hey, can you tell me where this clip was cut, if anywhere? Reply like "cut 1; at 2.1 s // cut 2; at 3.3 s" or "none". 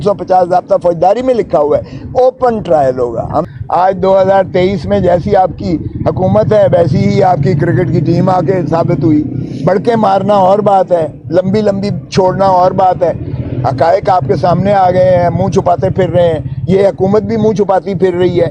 cut 1; at 3.5 s